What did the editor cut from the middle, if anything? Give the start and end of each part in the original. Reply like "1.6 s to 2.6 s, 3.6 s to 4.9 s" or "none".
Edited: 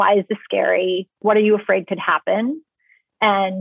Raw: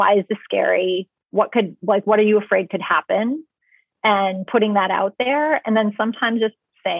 1.2 s to 2.0 s